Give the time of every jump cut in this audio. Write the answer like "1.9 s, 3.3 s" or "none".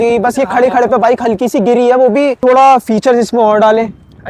2.4 s